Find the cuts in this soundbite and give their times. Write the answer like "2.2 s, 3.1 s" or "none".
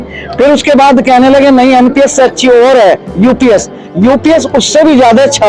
none